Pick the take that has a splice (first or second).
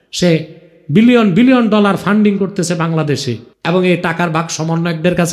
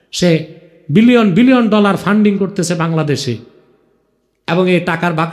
first